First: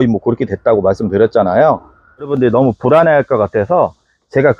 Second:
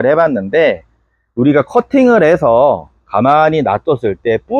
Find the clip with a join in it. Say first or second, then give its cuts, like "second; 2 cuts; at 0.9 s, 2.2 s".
first; 1 cut; at 2.3 s